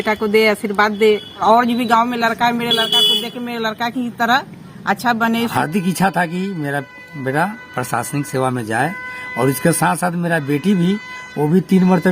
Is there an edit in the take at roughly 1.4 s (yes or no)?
yes